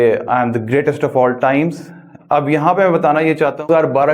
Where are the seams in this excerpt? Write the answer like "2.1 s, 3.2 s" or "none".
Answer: none